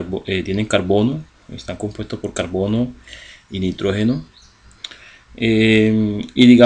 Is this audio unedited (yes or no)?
no